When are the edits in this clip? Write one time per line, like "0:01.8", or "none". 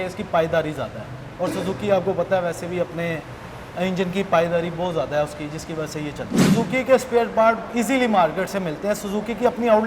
0:06.4